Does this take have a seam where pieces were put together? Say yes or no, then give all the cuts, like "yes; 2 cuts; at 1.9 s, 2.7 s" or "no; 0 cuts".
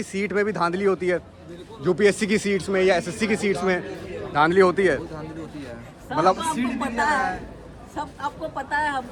no; 0 cuts